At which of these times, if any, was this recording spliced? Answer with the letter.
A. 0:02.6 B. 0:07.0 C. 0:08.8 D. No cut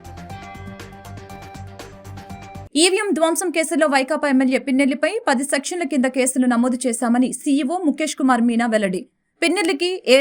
A